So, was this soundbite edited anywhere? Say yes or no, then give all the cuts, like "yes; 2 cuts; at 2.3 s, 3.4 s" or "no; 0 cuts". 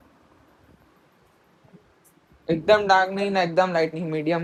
no; 0 cuts